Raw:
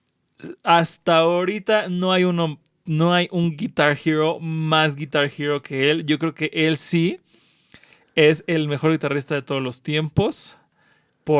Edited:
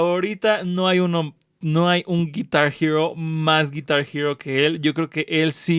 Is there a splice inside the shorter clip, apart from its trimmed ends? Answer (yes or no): no